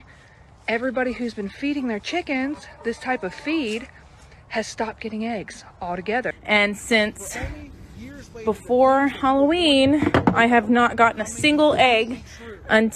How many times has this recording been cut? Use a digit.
1